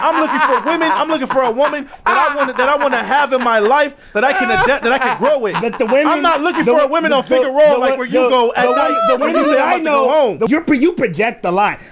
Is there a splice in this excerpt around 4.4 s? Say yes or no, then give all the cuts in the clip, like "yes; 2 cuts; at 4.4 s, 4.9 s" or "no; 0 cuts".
no; 1 cut; at 10.5 s